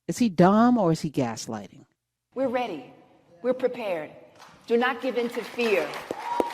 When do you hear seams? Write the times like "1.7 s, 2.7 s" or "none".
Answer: 2.2 s